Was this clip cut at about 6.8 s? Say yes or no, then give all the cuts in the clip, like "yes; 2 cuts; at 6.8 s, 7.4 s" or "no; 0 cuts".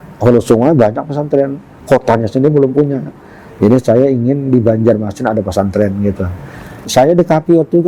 yes; 1 cut; at 6.8 s